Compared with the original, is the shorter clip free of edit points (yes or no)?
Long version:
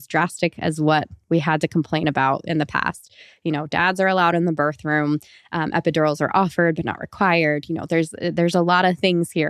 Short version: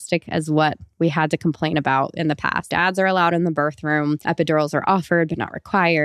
no